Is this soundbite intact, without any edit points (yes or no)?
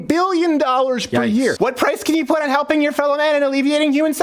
no